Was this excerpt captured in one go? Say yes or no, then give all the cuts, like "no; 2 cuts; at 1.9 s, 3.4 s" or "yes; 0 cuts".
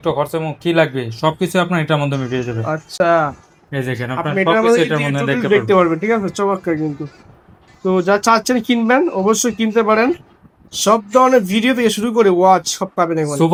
yes; 0 cuts